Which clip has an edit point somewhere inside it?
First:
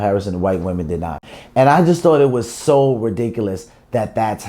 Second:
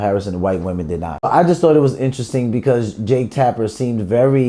second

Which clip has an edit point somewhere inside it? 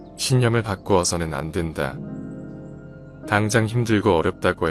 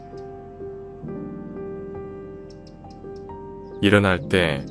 second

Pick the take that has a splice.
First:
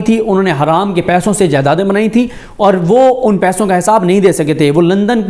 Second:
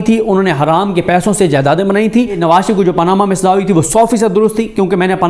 second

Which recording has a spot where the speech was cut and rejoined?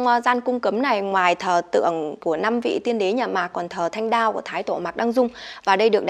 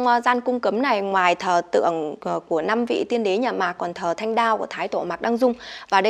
first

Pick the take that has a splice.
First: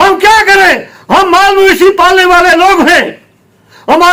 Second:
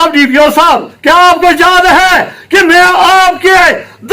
second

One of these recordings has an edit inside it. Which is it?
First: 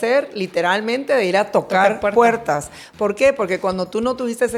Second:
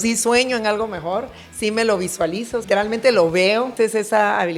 second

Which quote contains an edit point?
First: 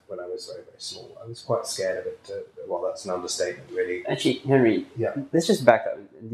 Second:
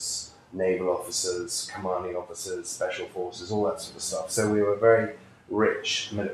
first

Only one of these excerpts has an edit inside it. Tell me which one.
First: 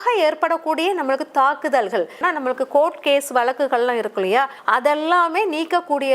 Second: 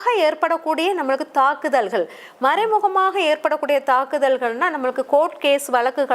first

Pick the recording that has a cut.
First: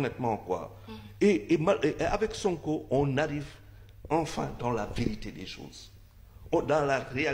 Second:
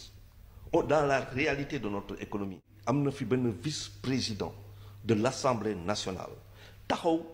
second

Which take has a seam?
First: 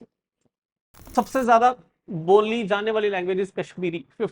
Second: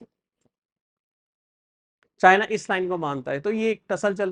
first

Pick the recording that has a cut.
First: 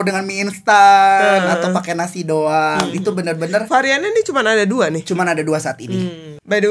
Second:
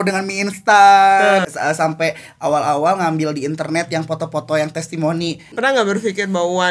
second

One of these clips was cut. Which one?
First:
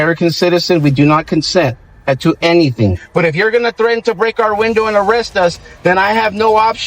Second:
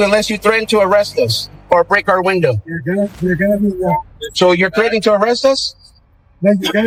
first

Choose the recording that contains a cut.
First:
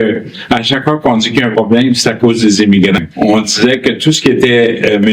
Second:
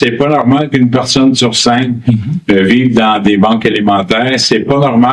first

